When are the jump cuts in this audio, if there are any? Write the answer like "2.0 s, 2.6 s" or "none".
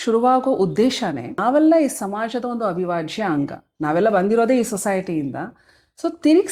1.3 s